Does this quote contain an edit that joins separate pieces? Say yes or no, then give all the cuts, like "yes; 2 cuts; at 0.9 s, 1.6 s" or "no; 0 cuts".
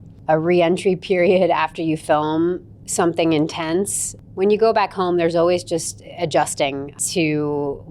yes; 2 cuts; at 4.1 s, 6.9 s